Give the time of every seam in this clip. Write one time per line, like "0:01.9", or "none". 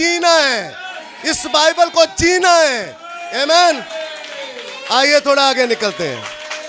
none